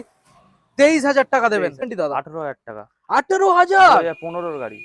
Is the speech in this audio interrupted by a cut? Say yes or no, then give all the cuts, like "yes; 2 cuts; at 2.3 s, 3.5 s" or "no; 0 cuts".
yes; 1 cut; at 1.9 s